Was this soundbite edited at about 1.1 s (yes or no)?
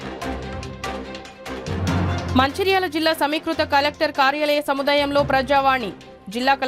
yes